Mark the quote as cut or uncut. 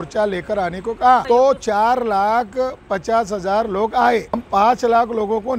cut